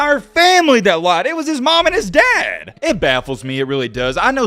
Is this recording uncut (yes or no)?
no